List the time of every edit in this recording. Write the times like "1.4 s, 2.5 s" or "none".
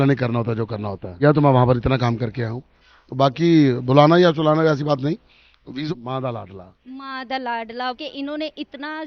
1.2 s, 5.9 s